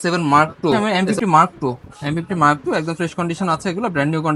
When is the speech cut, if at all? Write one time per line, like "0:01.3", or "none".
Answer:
0:01.0